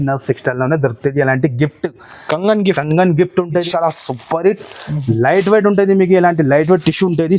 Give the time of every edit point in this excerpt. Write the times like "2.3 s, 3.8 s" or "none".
3.6 s